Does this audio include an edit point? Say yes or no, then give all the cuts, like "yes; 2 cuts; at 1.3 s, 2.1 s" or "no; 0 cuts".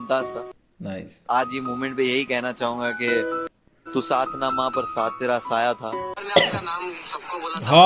yes; 1 cut; at 6.2 s